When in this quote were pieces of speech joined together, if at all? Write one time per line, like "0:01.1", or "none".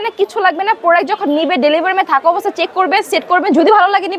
none